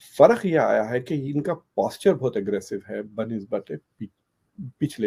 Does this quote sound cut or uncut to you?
uncut